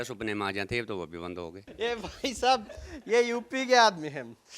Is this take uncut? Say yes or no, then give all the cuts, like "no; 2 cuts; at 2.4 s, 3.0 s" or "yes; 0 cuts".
no; 1 cut; at 1.6 s